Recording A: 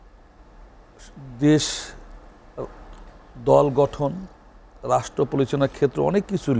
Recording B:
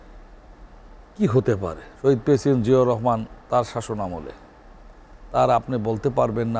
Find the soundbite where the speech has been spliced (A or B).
B